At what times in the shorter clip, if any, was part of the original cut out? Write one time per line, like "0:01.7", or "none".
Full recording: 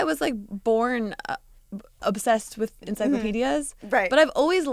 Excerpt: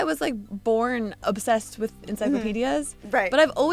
0:01.1